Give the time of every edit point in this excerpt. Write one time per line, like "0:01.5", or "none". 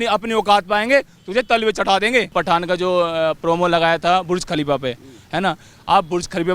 0:02.3